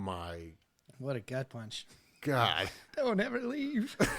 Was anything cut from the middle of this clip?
yes; 1 cut; at 2.8 s

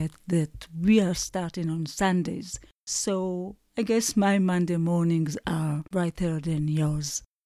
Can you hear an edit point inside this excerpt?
yes; 1 cut; at 5.8 s

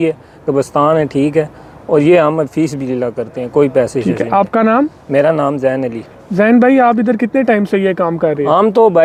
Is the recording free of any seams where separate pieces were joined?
yes; 0 cuts

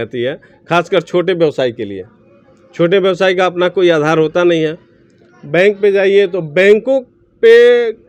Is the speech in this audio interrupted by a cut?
no; 0 cuts

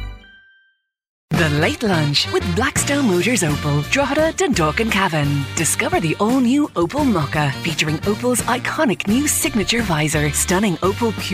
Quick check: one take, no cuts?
no; 1 cut; at 1.2 s

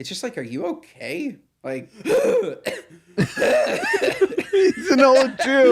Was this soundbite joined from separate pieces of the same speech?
yes; 1 cut; at 1.9 s

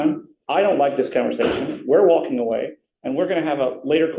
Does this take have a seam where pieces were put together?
no; 0 cuts

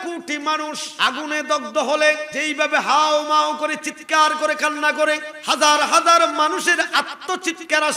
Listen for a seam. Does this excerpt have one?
yes; 3 cuts; at 0.9 s, 2.3 s, 5.3 s

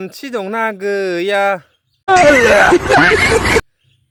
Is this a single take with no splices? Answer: yes; 0 cuts

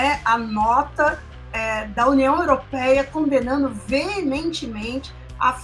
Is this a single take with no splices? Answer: yes; 0 cuts

